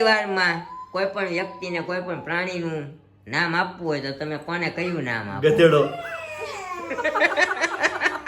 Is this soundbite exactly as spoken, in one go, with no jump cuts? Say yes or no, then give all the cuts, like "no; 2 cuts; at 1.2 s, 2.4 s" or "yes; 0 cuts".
yes; 0 cuts